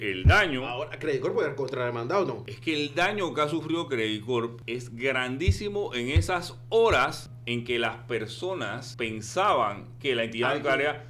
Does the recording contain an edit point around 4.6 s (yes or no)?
yes